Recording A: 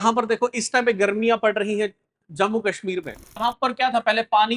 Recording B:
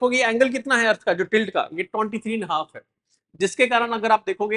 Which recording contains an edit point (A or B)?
A